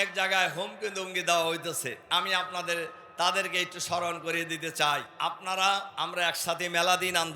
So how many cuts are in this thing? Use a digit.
3